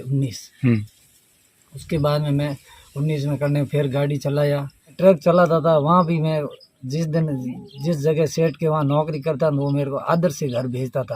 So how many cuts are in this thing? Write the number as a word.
one